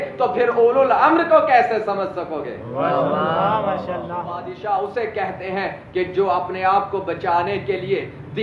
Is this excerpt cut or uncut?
cut